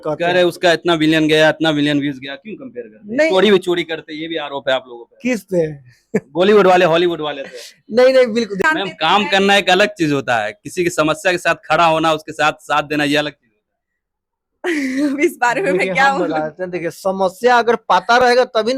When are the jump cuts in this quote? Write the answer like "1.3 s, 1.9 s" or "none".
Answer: 8.7 s